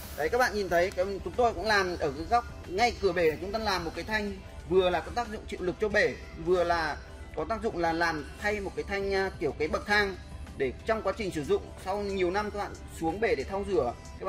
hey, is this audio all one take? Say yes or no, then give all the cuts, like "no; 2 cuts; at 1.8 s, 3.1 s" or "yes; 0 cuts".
yes; 0 cuts